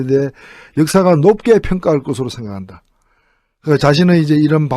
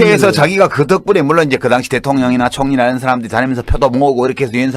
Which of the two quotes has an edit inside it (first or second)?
second